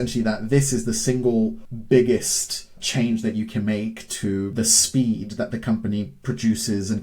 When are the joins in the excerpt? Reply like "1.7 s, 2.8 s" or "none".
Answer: 1.7 s, 2.8 s, 4.5 s